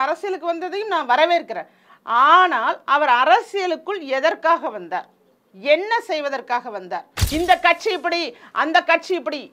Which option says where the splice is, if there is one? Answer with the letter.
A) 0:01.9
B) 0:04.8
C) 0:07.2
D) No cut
C